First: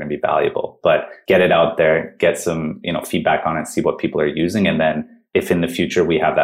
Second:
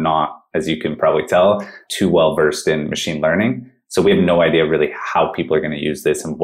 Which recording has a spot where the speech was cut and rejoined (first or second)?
first